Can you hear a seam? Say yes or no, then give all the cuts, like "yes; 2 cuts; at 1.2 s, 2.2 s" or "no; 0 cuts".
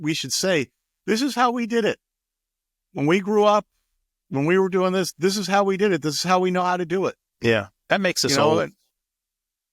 no; 0 cuts